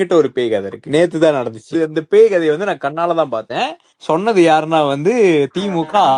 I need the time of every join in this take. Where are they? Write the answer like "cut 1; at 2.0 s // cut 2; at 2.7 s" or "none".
none